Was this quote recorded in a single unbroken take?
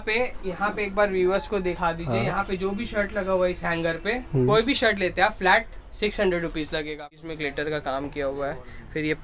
no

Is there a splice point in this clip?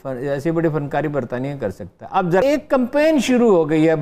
yes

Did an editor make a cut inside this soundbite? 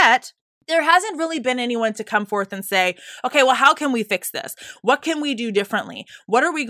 no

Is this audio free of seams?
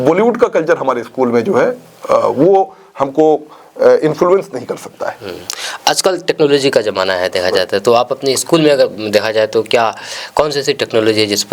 yes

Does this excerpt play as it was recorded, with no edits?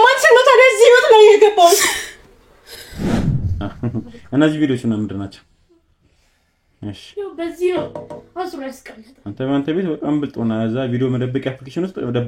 no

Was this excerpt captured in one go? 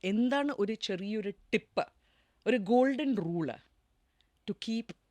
yes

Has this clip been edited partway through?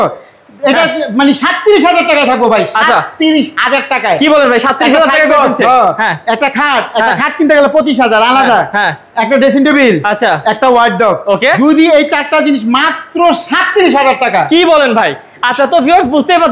no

